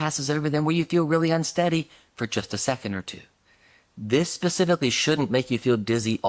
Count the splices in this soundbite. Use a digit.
0